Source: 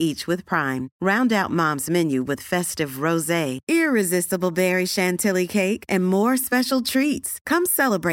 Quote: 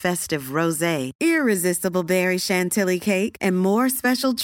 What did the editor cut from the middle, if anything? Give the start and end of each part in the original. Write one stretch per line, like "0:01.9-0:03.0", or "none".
none